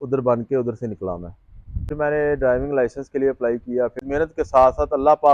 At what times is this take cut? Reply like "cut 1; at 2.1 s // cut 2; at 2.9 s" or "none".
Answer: cut 1; at 1.9 s // cut 2; at 4.0 s